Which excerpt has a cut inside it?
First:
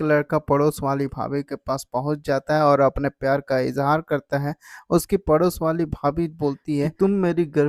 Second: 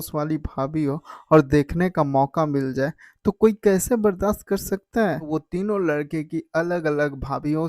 second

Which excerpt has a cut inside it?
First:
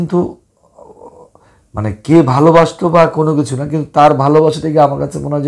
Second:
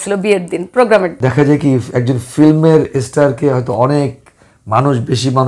second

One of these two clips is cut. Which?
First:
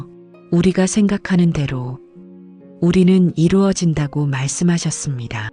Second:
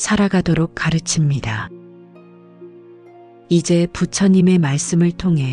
second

